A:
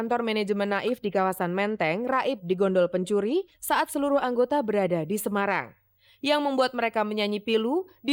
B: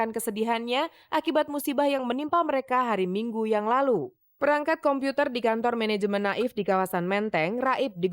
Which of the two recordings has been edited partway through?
B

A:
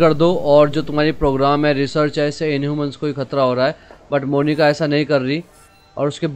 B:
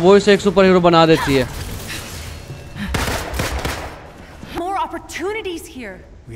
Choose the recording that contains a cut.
B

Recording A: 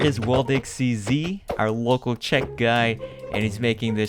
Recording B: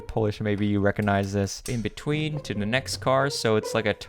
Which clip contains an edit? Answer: B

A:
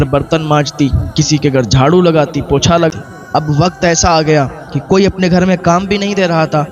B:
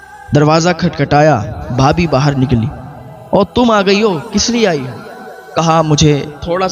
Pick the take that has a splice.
A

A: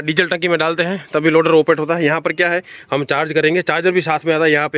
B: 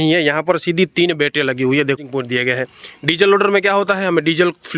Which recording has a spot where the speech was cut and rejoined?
B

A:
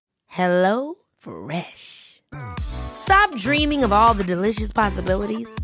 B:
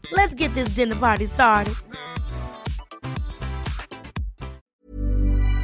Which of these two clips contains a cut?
B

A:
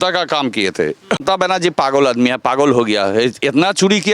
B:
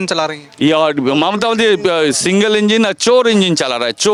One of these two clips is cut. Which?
A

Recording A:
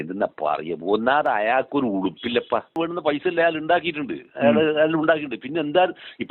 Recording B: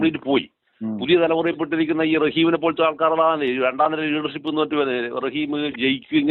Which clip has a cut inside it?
A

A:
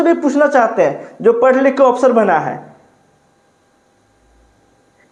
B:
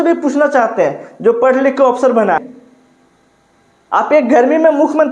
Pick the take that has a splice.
B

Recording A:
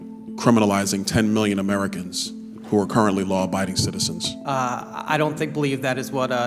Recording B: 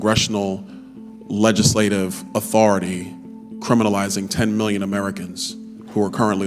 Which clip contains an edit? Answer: A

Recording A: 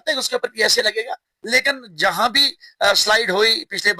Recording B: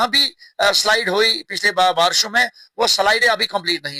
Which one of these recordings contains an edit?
A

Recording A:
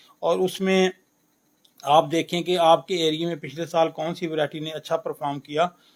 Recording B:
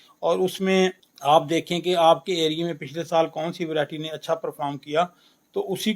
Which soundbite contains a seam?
B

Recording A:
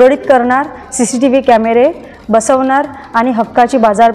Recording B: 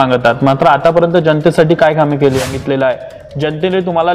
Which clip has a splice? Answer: B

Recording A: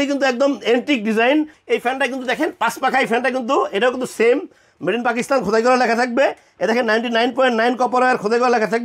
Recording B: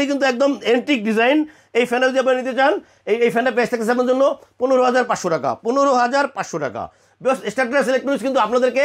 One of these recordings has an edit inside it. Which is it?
A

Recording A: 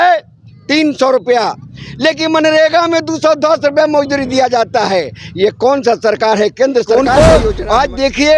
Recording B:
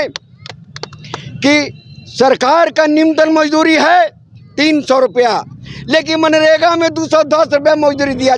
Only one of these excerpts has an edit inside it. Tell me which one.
A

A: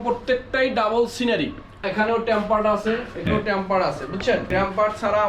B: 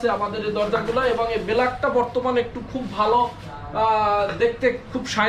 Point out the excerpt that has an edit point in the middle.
A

